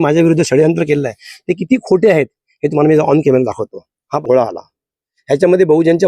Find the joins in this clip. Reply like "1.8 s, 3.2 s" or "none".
4.1 s